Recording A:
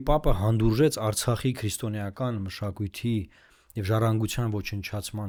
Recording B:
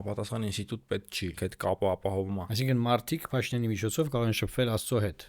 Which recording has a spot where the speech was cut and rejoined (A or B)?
B